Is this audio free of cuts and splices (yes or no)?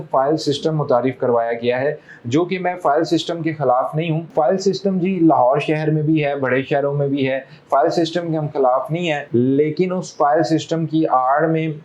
yes